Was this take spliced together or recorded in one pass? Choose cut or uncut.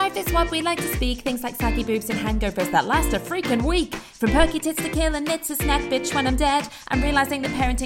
uncut